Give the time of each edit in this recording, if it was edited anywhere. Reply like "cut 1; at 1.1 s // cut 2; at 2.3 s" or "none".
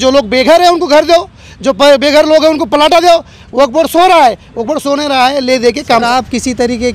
cut 1; at 6.1 s